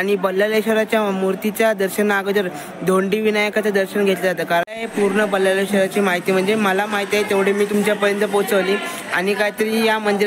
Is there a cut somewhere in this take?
yes; 1 cut; at 4.7 s

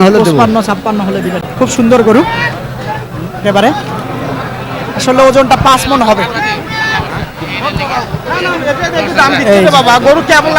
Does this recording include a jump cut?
yes; 1 cut; at 1.4 s

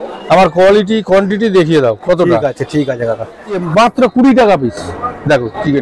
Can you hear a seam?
yes; 1 cut; at 3.7 s

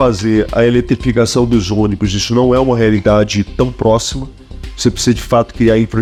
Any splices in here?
no; 0 cuts

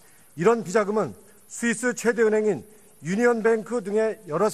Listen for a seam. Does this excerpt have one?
no; 0 cuts

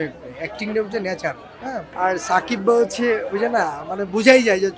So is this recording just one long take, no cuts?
no; 1 cut; at 1.9 s

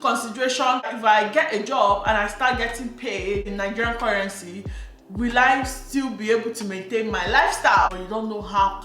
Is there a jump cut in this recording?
yes; 2 cuts; at 0.9 s, 7.9 s

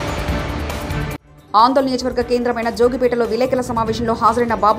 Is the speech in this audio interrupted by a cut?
no; 0 cuts

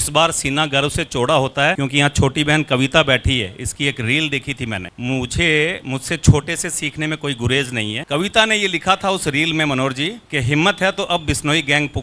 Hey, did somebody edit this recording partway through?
no; 0 cuts

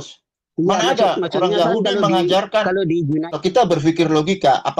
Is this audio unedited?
no; 1 cut; at 3.3 s

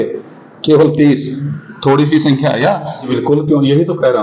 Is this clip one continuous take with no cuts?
no; 1 cut; at 3.1 s

